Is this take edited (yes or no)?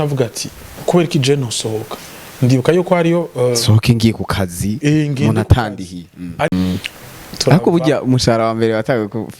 yes